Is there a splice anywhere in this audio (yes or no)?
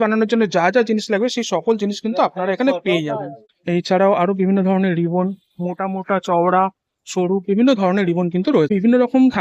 yes